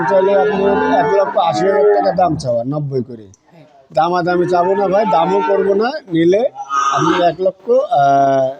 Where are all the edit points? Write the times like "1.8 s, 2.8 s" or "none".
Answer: none